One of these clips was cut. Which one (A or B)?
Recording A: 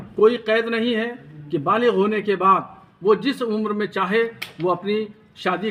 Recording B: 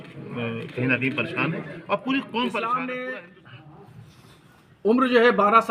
B